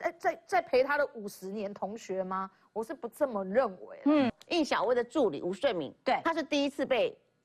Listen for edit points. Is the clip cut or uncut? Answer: cut